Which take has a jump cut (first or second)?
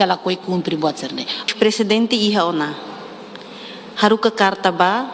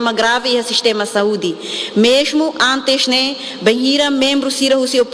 first